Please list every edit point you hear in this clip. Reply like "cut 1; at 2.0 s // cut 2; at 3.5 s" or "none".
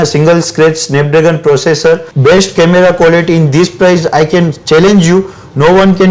cut 1; at 2.1 s